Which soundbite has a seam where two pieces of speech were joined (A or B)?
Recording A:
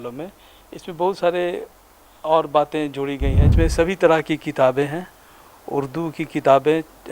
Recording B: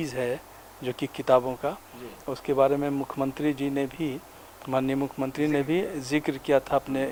A